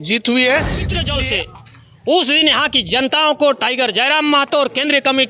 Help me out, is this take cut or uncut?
cut